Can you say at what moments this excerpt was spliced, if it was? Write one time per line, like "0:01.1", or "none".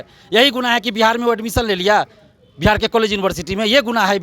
none